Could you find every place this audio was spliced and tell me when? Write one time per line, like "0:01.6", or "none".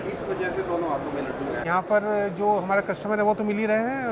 0:01.6